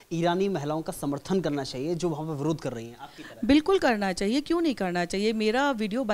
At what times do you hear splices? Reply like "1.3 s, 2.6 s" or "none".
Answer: none